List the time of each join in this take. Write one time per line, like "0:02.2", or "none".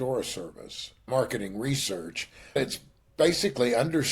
0:01.1
0:02.6